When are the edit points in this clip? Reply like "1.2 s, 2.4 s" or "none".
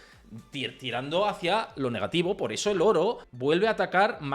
3.3 s